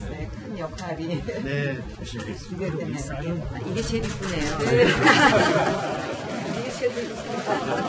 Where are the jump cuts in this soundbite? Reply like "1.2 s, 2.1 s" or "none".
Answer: 4.1 s